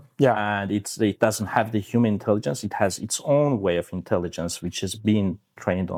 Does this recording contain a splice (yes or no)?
no